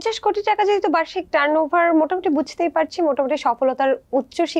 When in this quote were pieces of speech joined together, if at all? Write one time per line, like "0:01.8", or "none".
none